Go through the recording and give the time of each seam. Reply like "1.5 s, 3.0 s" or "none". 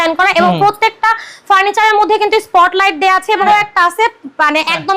3.4 s